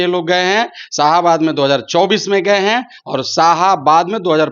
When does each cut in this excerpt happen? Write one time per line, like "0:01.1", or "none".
none